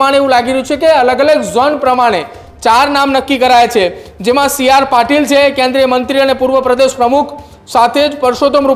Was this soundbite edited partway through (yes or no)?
no